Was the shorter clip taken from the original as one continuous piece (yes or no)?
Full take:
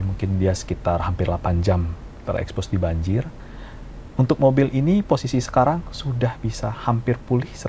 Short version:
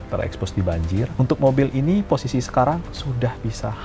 no